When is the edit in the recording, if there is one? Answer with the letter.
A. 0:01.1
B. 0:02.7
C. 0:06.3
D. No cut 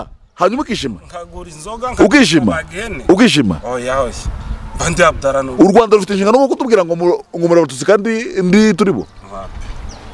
D